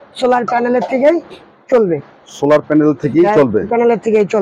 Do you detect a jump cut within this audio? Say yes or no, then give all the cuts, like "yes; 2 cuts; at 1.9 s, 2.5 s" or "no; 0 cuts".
no; 0 cuts